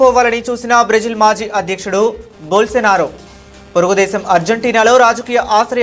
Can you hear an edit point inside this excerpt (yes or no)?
no